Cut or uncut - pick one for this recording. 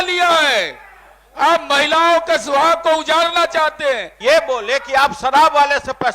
cut